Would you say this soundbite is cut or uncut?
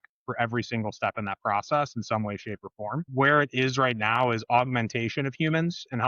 cut